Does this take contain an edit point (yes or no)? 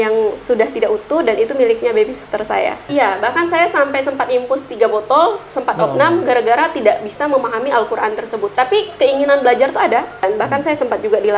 yes